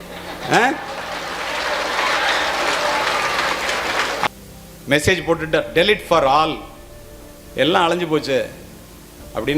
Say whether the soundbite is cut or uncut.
cut